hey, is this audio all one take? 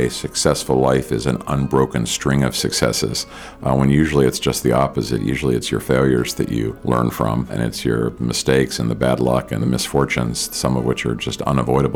no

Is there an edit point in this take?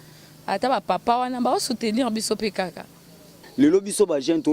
yes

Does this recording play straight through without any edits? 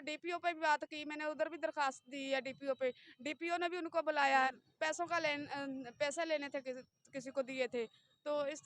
no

